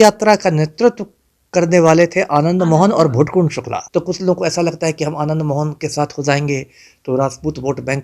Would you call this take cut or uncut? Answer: cut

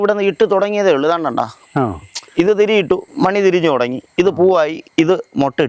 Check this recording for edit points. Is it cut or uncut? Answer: uncut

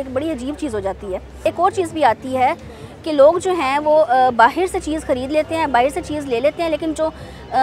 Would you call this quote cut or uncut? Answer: uncut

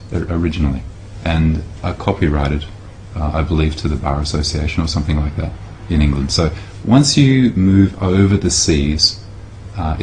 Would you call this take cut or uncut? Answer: uncut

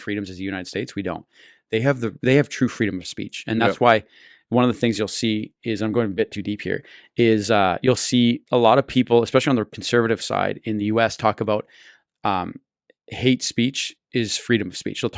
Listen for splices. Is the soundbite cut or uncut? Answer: uncut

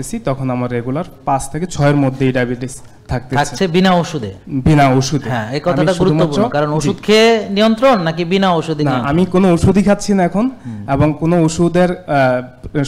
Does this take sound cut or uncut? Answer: uncut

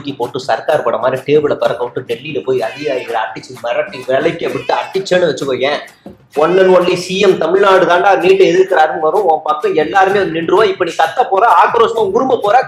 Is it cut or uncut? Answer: uncut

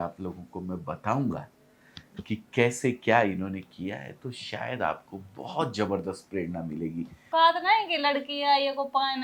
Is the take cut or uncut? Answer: cut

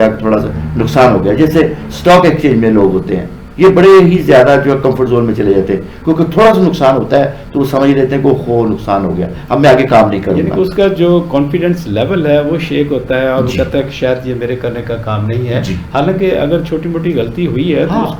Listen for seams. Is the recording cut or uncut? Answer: uncut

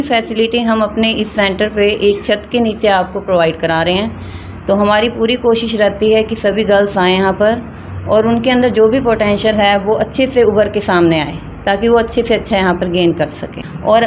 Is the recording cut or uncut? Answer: uncut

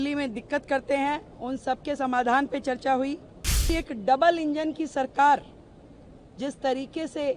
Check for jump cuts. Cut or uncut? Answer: cut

